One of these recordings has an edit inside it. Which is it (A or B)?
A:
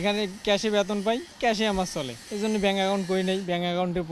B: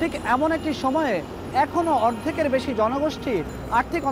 A